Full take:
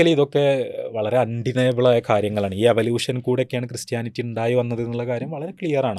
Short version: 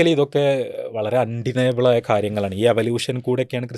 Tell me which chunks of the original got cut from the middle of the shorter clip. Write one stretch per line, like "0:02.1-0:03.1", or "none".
none